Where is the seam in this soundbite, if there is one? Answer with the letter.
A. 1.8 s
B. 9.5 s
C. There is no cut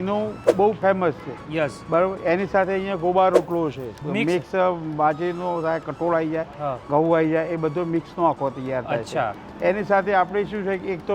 B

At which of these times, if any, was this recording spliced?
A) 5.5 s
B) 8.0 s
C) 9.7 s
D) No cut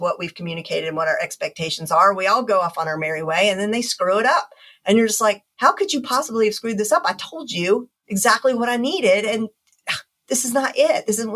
B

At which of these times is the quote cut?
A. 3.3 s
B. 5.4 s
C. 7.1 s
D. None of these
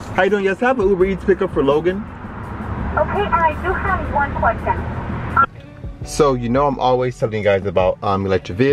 B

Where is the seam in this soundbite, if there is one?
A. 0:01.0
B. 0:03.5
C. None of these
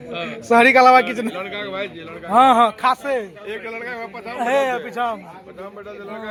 C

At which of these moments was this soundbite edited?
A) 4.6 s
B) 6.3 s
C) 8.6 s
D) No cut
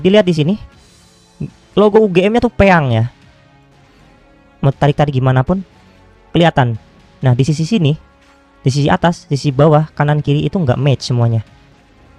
D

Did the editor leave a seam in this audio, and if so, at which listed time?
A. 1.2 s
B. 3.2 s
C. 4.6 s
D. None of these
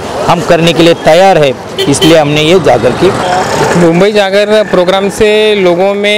B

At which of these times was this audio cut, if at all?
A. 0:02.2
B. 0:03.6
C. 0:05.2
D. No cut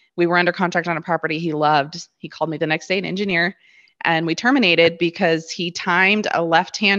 D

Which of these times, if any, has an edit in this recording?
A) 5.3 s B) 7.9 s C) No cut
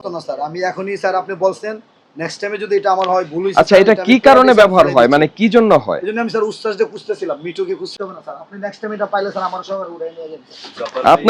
B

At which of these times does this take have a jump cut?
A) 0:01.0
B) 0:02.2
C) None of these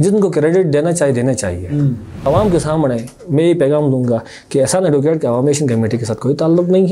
B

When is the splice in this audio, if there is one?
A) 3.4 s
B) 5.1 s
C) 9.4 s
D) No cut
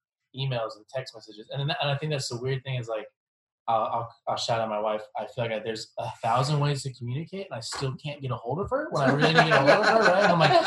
B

